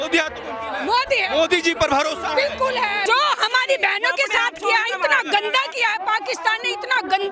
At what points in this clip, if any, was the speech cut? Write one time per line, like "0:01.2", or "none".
0:03.0